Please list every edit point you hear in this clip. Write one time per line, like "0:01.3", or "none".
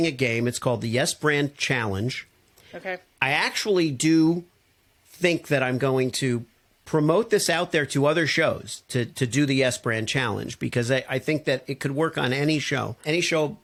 none